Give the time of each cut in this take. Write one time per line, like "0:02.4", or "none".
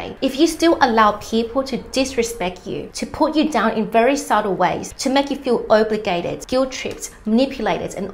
0:04.9